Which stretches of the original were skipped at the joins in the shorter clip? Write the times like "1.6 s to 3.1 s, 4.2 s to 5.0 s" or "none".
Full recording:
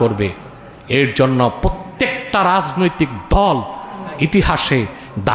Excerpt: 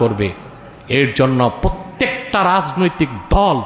none